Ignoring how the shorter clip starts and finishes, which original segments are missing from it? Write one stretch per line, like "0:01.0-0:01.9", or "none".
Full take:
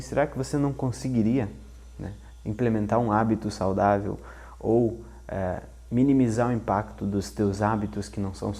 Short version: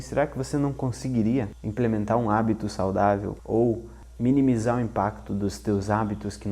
0:01.6-0:02.4
0:04.2-0:04.5
0:05.2-0:05.7